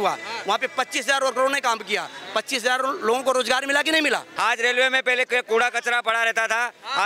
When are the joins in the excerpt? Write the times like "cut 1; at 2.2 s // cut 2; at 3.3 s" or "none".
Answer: cut 1; at 4.3 s